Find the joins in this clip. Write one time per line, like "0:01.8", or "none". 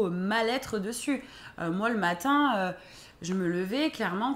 none

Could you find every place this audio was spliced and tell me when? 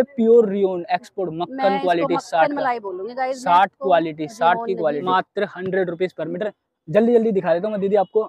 0:05.0

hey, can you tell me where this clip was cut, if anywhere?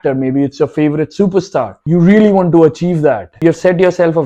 none

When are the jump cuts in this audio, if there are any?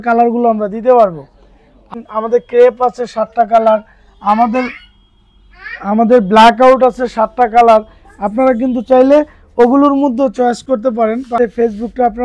0:01.9
0:11.4

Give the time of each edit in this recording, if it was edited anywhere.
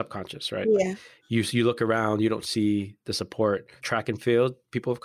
0:03.7

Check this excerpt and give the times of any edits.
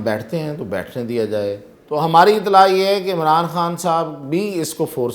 0:01.7

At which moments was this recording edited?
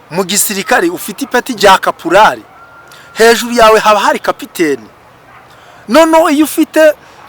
0:01.5

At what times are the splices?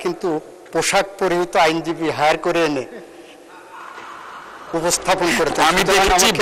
none

